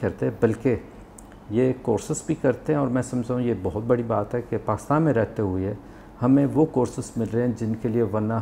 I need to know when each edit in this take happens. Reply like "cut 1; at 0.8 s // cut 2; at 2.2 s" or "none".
none